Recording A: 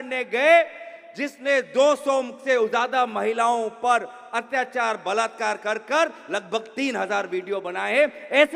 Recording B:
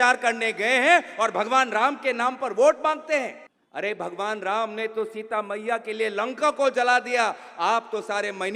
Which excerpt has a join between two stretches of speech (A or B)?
B